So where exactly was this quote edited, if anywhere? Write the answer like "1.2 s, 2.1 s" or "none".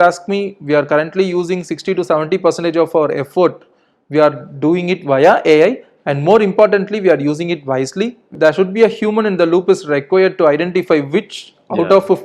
8.3 s